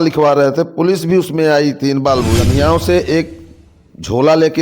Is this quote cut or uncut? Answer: cut